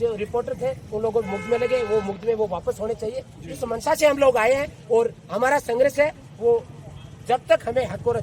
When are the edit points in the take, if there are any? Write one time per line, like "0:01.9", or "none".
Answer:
none